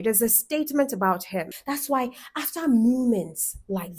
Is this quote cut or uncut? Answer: cut